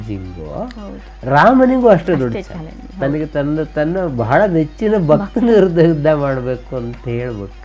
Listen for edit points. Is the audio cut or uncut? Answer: uncut